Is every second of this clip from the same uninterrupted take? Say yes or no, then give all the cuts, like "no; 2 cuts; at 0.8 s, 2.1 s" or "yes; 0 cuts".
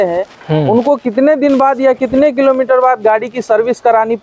yes; 0 cuts